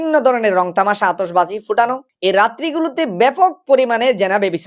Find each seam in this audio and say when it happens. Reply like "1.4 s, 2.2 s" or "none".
2.0 s

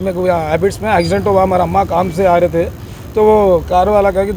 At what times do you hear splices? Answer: none

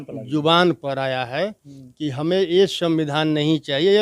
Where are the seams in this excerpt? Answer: none

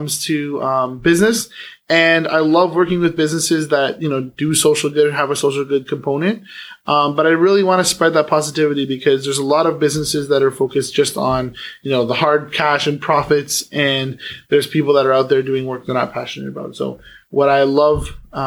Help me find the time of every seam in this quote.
none

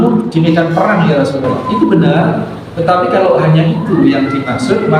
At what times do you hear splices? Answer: 1.6 s

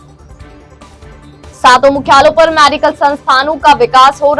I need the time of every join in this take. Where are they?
1.1 s

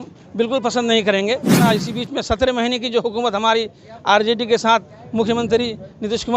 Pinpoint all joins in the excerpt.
1.7 s

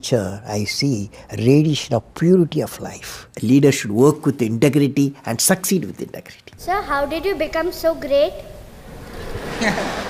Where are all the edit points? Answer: 3.2 s, 6.6 s

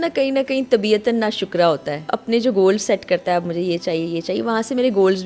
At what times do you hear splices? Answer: 2.1 s

